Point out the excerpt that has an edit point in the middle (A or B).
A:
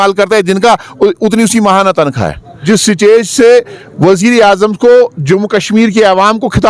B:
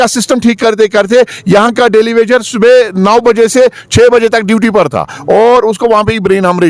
A